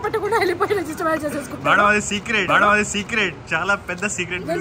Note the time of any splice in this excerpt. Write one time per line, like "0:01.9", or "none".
0:03.3